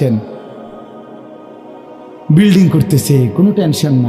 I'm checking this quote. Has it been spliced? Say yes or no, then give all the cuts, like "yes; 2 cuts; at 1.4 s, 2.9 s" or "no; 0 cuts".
no; 0 cuts